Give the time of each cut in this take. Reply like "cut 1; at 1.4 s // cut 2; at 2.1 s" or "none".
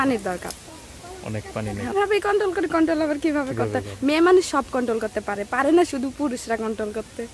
cut 1; at 1.9 s